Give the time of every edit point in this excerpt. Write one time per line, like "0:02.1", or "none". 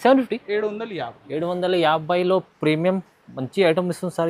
none